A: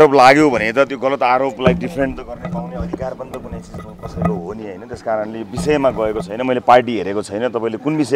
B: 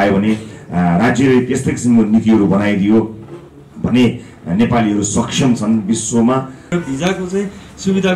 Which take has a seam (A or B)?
B